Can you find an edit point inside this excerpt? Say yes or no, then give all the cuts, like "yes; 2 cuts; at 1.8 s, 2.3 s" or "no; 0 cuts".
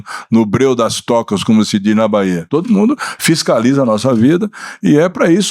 yes; 1 cut; at 2.4 s